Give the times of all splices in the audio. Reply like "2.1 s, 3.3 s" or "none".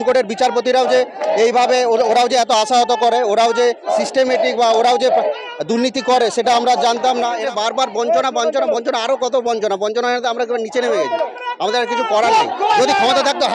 7.4 s